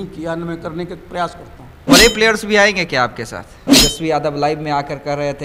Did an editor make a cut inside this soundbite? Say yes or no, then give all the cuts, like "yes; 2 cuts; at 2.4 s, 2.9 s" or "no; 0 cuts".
yes; 2 cuts; at 1.8 s, 3.7 s